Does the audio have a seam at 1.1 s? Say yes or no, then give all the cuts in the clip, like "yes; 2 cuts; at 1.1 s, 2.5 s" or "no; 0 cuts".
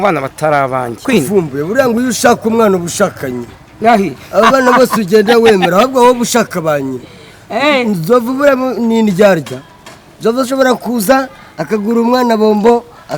yes; 1 cut; at 1.1 s